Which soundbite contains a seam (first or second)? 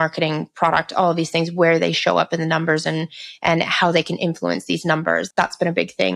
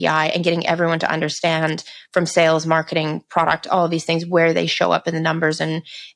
first